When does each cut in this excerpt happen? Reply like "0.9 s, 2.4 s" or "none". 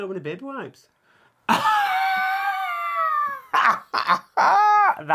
none

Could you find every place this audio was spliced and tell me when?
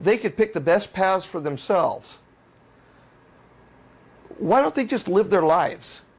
none

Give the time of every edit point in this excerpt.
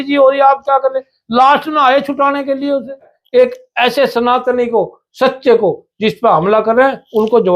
3.2 s

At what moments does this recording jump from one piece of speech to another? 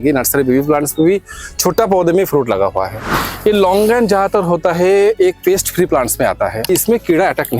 3.0 s, 6.7 s

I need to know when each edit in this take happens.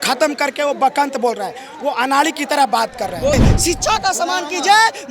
3.3 s

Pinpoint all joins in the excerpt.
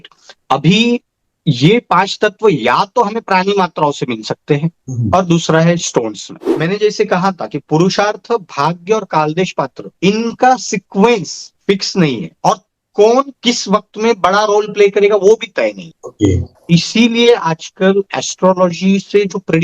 6.4 s

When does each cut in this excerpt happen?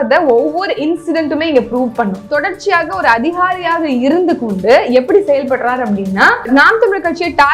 2.2 s, 6.4 s

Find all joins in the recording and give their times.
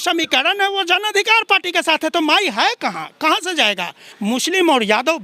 4.1 s

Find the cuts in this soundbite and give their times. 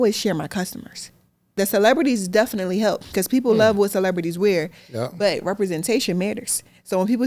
1.5 s

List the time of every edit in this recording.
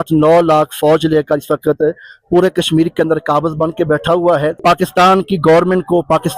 4.6 s

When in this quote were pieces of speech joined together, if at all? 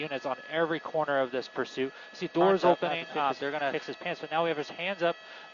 3.7 s

